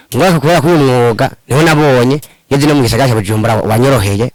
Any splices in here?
no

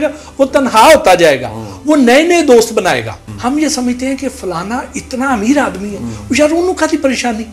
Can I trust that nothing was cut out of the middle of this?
no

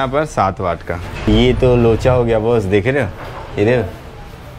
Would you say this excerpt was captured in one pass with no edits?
no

